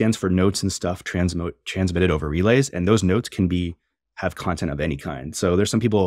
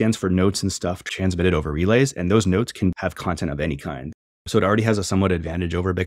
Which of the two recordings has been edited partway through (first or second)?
second